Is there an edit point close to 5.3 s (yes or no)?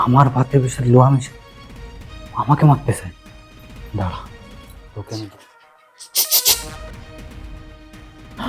yes